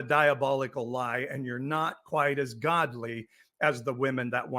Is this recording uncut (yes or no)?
yes